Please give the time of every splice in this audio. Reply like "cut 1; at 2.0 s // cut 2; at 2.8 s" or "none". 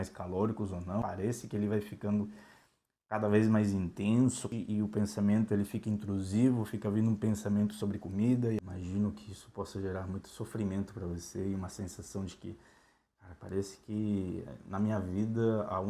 cut 1; at 1.0 s // cut 2; at 4.4 s // cut 3; at 8.6 s